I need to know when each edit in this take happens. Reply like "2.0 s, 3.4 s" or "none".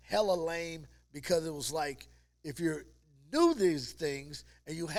none